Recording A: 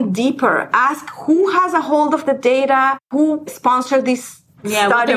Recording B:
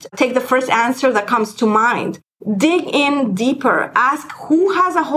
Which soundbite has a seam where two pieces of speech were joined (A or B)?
A